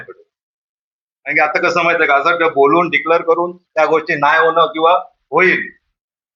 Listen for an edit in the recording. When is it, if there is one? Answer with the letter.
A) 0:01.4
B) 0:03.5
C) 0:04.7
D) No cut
D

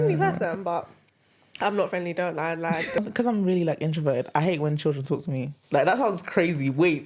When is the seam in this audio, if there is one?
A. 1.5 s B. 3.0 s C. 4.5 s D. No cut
B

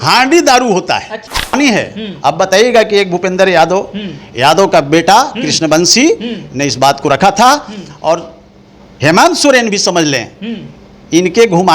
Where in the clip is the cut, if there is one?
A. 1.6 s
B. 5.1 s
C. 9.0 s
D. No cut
A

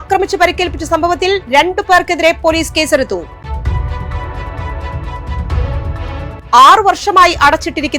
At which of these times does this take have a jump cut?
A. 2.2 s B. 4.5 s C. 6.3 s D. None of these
D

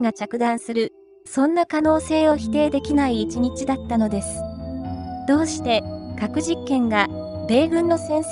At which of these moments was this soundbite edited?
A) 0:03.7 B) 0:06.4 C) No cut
B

